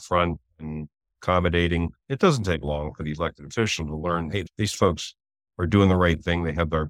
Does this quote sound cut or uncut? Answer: uncut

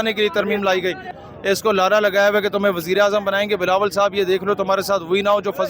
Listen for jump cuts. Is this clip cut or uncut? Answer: cut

